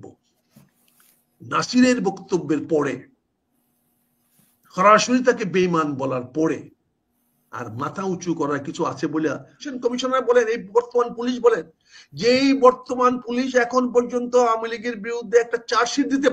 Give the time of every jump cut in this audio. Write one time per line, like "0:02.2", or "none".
0:09.7